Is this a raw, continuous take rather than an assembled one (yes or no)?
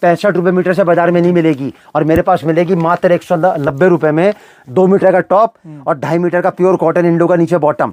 yes